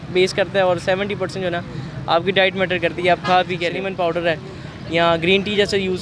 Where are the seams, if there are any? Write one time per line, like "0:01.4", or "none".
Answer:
0:03.8